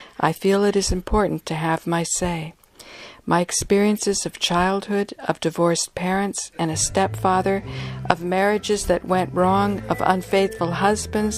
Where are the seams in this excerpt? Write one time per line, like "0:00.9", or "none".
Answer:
0:09.6